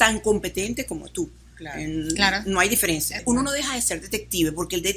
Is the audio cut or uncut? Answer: cut